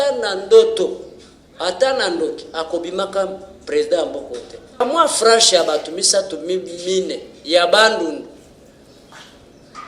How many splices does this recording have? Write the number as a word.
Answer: one